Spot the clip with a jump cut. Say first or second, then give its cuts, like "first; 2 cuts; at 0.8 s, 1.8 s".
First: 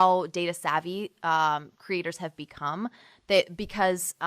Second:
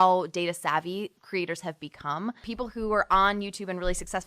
second; 2 cuts; at 1.1 s, 2.5 s